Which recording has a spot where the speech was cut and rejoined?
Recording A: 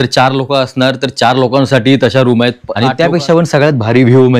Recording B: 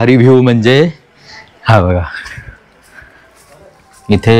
A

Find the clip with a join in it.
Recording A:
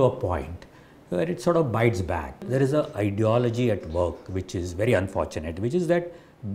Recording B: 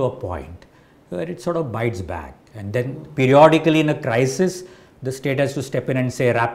A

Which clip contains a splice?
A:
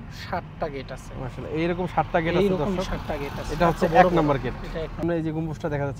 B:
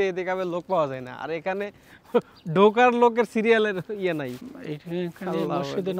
A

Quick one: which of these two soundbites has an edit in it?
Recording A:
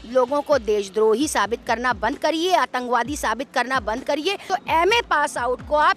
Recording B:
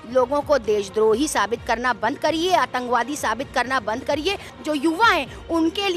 A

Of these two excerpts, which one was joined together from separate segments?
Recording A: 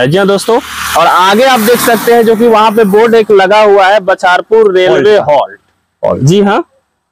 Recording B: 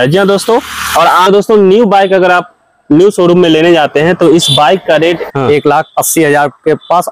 B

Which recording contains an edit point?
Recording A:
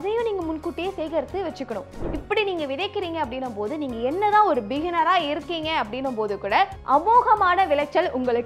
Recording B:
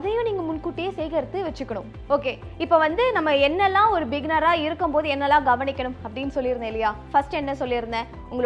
A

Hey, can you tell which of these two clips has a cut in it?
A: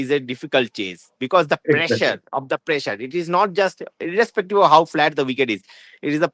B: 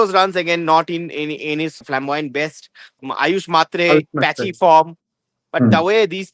B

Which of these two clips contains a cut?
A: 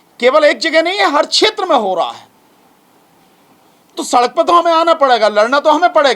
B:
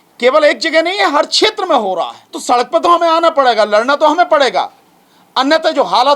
B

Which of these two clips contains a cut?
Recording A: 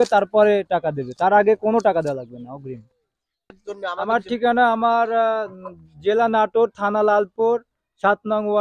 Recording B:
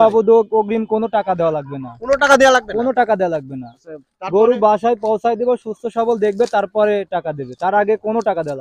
A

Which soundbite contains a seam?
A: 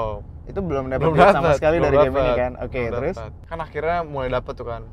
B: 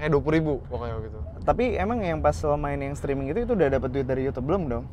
A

